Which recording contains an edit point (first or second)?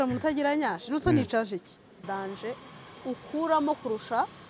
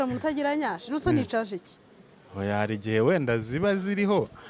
first